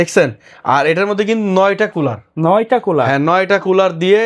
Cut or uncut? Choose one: uncut